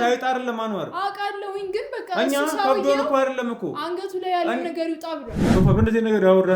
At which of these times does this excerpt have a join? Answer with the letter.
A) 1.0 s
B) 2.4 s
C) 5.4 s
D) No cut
C